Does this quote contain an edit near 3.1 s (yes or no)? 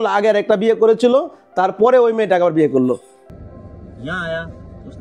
yes